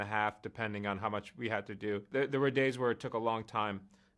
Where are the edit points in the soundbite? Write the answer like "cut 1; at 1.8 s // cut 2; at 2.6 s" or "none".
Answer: cut 1; at 2.1 s